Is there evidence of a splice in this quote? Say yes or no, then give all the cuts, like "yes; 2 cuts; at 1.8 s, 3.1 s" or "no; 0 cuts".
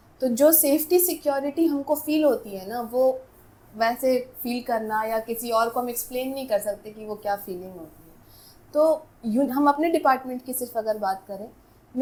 no; 0 cuts